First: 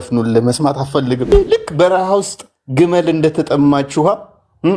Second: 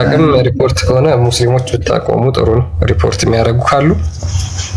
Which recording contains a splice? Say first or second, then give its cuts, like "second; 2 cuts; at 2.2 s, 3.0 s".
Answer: first; 1 cut; at 1.3 s